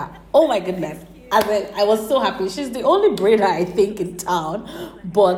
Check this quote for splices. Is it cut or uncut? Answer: uncut